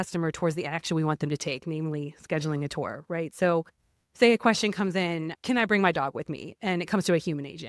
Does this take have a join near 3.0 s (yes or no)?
no